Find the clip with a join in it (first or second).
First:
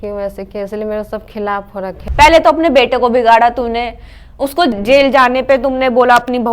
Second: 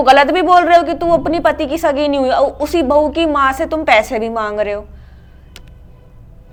first